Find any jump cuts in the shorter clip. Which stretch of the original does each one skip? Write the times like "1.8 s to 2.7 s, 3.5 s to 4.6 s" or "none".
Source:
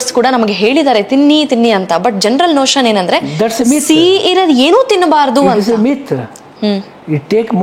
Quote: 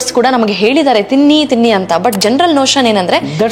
none